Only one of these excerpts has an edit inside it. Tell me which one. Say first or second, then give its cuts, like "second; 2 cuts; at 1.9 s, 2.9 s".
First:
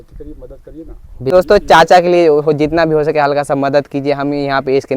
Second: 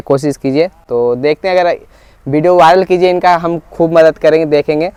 first; 1 cut; at 1.3 s